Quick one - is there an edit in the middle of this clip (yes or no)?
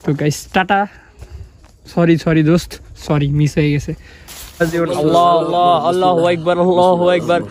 yes